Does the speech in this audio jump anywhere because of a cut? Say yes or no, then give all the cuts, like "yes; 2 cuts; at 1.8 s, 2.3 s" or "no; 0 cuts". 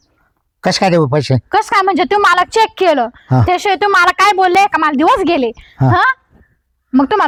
no; 0 cuts